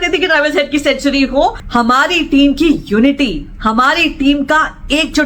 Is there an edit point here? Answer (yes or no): yes